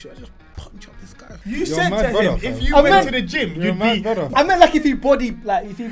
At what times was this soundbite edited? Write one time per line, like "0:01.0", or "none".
0:01.3
0:04.3